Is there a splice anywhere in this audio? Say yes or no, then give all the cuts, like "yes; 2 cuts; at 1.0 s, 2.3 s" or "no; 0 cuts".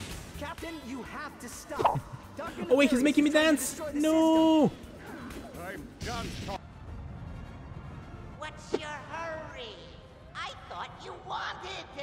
yes; 1 cut; at 6.6 s